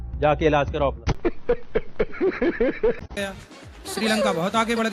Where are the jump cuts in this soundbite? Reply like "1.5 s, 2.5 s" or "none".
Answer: 3.0 s